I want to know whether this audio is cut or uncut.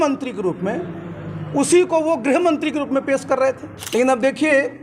cut